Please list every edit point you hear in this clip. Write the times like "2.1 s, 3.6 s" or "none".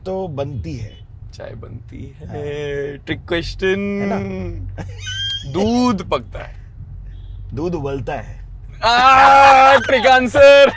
none